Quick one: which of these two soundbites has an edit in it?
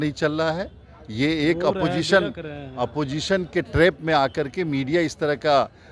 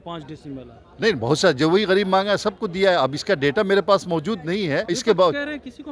second; 1 cut; at 4.9 s

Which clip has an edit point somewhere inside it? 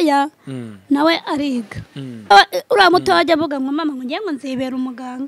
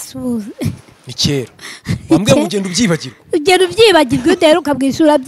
first; 1 cut; at 2.3 s

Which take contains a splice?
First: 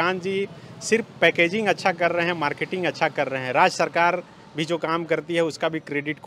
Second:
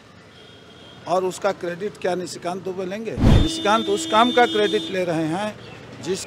second; 1 cut; at 3.3 s

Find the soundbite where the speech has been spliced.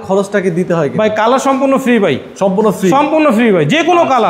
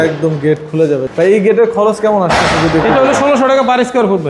second; 1 cut; at 1.0 s

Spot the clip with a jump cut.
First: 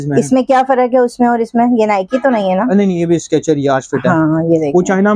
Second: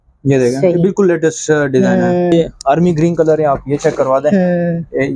second; 1 cut; at 2.3 s

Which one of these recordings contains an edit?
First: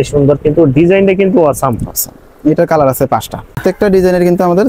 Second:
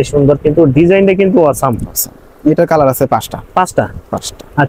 first; 1 cut; at 3.5 s

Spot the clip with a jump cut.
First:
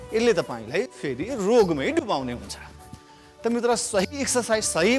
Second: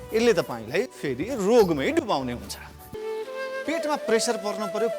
second; 1 cut; at 2.9 s

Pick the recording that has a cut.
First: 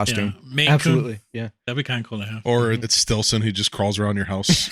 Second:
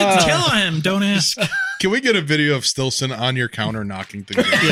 first; 1 cut; at 2.9 s

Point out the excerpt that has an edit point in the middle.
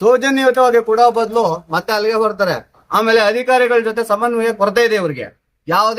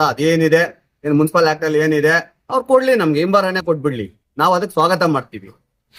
first; 1 cut; at 2.8 s

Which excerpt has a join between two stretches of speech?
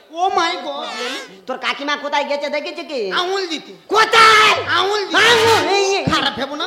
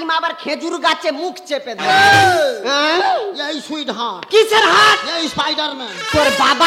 first; 1 cut; at 0.9 s

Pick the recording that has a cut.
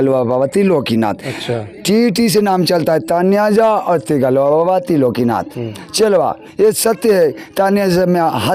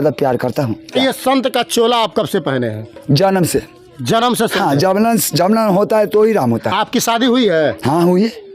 second; 1 cut; at 0.9 s

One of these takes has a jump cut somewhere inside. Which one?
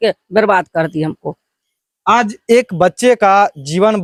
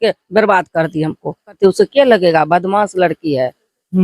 second; 1 cut; at 1.6 s

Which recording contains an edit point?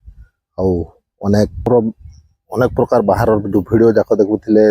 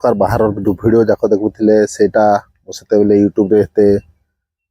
first; 1 cut; at 1.7 s

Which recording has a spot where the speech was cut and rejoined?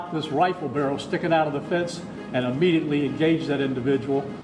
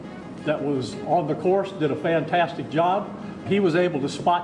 second; 1 cut; at 3.5 s

